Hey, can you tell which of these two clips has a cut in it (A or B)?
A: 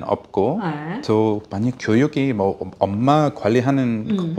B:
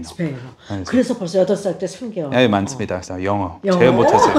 B